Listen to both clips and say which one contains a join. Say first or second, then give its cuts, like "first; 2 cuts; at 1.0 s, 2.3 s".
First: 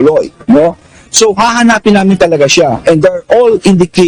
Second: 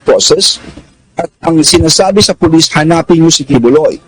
second; 1 cut; at 1.4 s